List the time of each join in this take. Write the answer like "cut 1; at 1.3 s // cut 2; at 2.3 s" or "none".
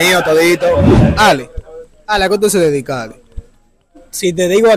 cut 1; at 1.0 s